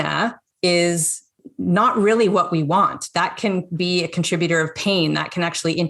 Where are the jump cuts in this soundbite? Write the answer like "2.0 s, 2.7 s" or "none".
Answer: 1.4 s

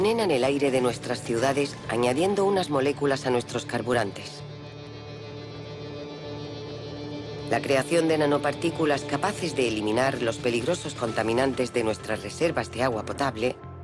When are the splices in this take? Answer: none

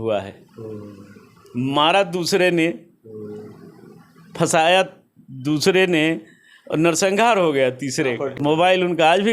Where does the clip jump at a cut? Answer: 8.3 s

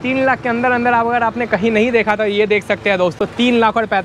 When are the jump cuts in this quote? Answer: none

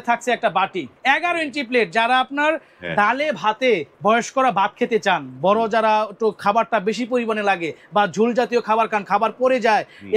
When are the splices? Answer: 0.9 s, 3.9 s

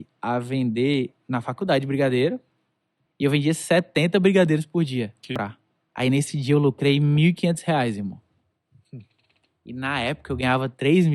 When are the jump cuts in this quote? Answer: 5.3 s

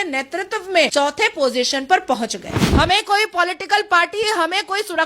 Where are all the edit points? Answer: 0.9 s, 2.7 s

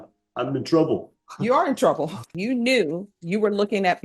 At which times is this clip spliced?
2.4 s

